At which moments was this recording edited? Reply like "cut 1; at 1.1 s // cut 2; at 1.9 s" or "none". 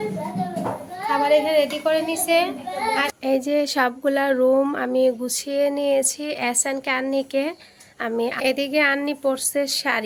cut 1; at 3.1 s // cut 2; at 8.4 s